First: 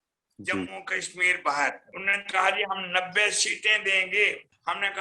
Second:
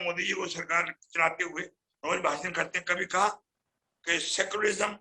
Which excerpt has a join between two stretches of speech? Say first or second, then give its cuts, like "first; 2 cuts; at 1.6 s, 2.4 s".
first; 1 cut; at 1.9 s